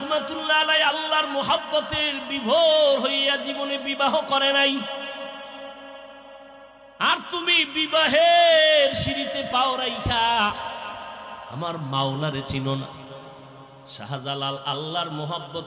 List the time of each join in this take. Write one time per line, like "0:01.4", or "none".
none